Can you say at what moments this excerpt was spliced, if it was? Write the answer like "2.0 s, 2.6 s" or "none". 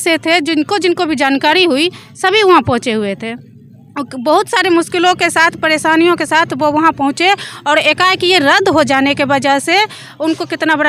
none